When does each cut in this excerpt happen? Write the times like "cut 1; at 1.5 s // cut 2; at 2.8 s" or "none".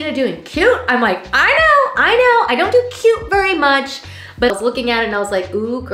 cut 1; at 4.5 s